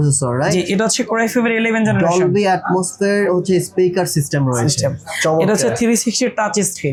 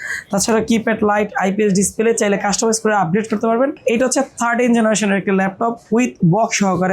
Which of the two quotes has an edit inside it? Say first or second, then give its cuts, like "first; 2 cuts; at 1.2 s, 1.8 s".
second; 1 cut; at 3.8 s